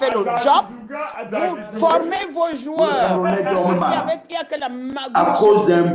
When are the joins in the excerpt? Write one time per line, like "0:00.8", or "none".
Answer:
0:03.1